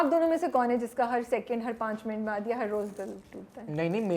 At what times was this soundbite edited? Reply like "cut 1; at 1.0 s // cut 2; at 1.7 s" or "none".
none